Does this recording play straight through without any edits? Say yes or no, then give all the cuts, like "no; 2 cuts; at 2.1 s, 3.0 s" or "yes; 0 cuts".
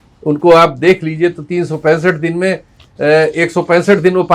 yes; 0 cuts